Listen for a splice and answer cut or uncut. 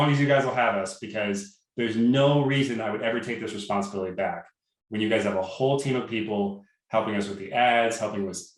uncut